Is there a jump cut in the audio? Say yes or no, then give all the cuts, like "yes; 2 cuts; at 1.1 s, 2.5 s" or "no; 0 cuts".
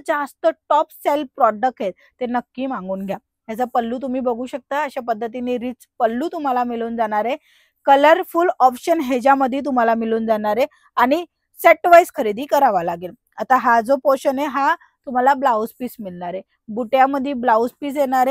no; 0 cuts